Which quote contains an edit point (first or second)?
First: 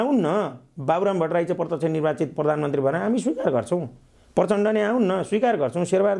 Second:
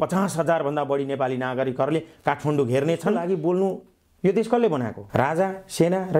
second